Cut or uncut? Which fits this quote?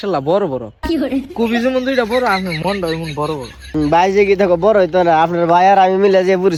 uncut